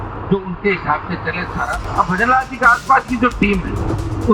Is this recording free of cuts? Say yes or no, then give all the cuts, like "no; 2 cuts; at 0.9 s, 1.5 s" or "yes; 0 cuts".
no; 1 cut; at 1.9 s